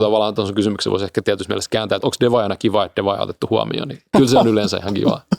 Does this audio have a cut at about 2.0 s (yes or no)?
yes